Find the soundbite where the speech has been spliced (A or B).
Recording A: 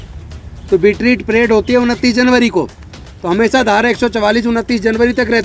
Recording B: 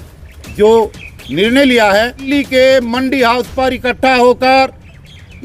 B